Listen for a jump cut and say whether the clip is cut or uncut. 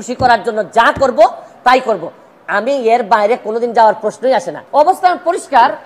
uncut